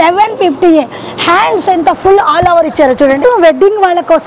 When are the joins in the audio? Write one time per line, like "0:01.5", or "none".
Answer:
0:03.2